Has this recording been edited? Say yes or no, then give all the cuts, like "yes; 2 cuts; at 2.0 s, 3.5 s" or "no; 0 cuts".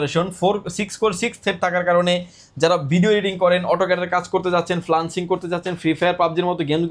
no; 0 cuts